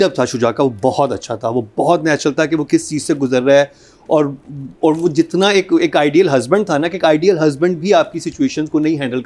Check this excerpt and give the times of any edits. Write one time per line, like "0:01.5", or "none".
none